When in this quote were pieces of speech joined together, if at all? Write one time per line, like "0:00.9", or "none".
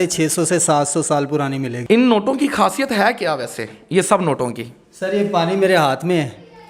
0:01.7